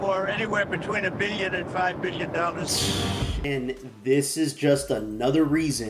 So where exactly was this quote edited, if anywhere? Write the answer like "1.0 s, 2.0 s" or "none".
3.3 s

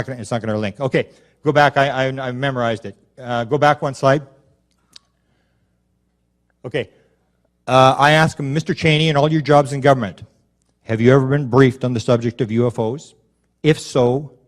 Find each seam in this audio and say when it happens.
9.3 s

